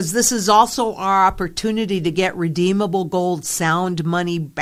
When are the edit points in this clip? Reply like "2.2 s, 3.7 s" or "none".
none